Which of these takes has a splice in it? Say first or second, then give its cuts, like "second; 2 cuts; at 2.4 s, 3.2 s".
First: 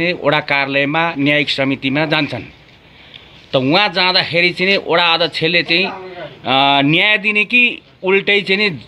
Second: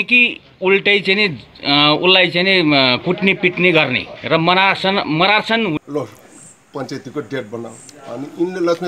second; 1 cut; at 5.9 s